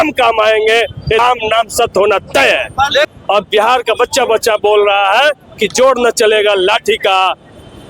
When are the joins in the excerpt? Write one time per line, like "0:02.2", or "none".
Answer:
0:01.2
0:03.1

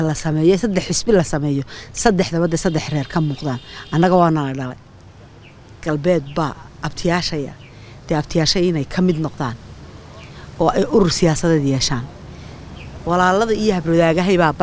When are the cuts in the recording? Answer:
none

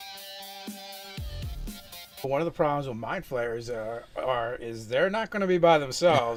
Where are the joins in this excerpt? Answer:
none

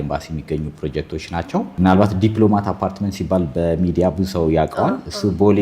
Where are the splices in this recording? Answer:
0:01.7

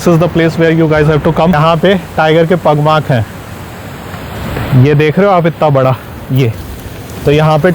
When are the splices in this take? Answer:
0:01.6

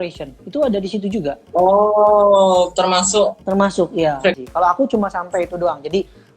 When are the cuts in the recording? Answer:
0:04.4

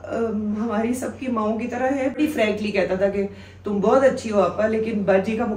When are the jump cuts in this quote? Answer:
0:02.2

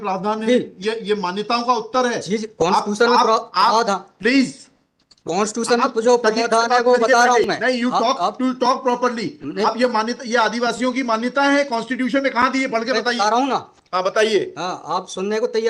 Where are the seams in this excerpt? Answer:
none

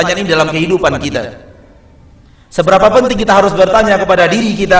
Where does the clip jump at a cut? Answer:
none

